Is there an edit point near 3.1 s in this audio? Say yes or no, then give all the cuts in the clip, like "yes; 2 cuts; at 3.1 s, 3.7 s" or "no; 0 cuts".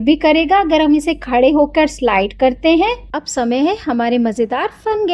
yes; 1 cut; at 3.1 s